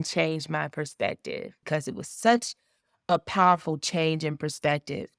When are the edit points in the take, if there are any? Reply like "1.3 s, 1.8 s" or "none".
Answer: 1.6 s

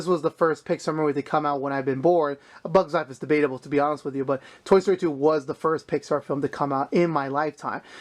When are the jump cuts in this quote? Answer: none

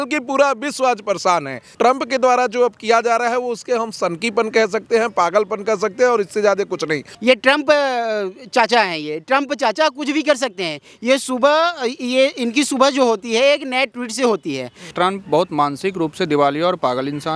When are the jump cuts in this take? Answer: 1.6 s, 7.1 s, 14.9 s

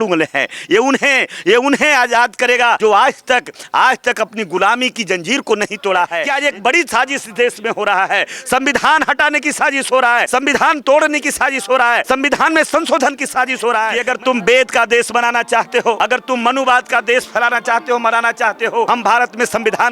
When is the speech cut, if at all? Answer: 2.8 s, 6.2 s, 10.3 s, 12.0 s, 14.0 s, 16.0 s, 18.9 s

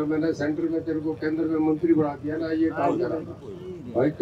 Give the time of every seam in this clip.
none

